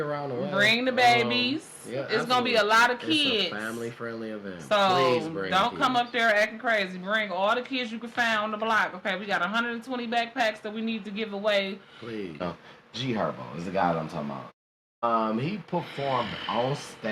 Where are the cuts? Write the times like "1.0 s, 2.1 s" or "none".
12.4 s